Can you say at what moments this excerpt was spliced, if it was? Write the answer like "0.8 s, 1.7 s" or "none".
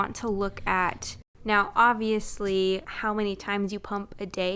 1.1 s, 2.9 s